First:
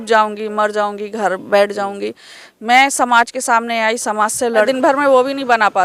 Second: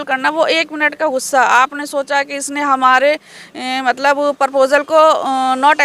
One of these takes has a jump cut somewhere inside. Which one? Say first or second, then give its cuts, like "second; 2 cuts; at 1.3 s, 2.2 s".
first; 1 cut; at 4.7 s